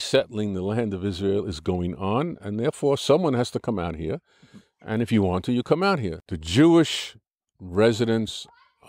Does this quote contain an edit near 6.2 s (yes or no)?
yes